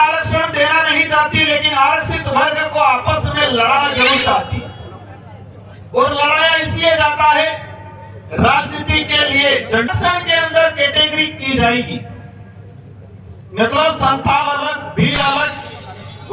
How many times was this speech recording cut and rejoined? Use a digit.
1